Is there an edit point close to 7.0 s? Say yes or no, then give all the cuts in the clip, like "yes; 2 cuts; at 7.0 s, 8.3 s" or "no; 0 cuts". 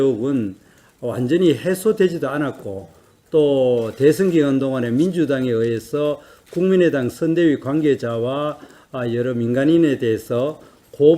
yes; 1 cut; at 7.0 s